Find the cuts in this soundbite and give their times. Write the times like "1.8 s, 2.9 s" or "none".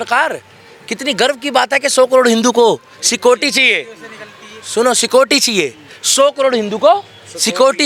none